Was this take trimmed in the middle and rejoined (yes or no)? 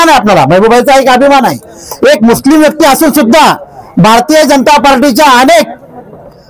no